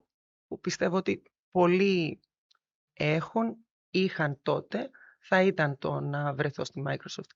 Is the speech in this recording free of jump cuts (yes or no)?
yes